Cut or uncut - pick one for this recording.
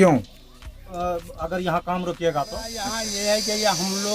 cut